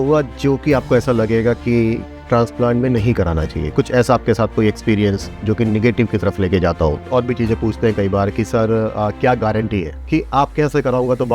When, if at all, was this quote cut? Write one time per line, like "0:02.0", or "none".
0:07.0